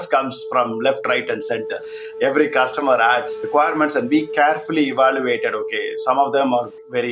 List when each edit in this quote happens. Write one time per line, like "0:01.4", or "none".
none